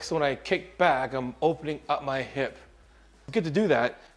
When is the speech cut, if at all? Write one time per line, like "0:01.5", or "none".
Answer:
0:03.2